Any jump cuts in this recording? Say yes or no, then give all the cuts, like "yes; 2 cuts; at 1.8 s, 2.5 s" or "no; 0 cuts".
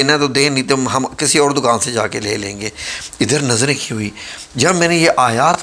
no; 0 cuts